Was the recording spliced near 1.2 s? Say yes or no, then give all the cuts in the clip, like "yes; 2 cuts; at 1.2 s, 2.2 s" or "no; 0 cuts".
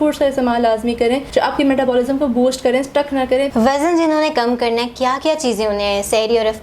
yes; 2 cuts; at 1.2 s, 3.5 s